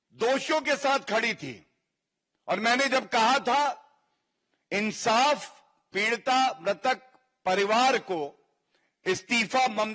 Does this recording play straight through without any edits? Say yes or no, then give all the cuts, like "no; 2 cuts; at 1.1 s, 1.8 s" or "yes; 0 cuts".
yes; 0 cuts